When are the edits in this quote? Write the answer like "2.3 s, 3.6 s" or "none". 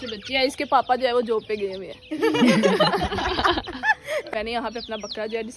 4.3 s